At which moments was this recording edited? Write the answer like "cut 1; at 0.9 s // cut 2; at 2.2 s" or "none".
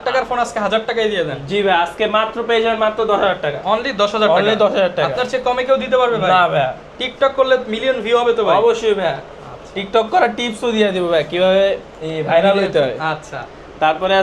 none